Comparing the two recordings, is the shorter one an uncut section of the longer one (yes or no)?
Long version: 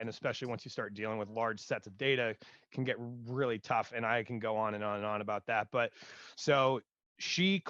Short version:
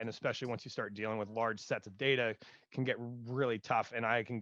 yes